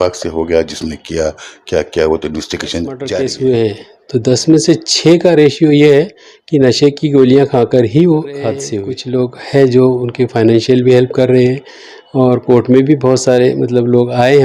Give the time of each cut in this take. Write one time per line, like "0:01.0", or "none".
0:03.0
0:08.7